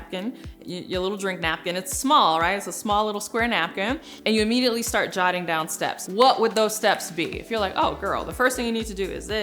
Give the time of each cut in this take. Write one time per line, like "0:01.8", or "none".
0:04.1
0:06.0